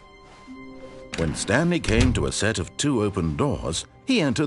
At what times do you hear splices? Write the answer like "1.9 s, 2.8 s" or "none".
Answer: 1.1 s, 3.6 s